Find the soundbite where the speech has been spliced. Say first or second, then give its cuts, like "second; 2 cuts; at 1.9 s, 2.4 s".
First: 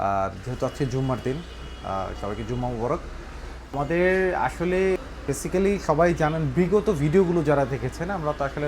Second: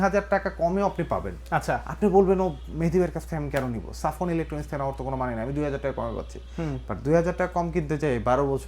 first; 2 cuts; at 3.7 s, 5.1 s